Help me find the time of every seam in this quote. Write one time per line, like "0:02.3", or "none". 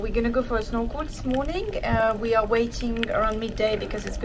none